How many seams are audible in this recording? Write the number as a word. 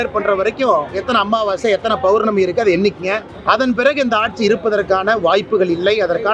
one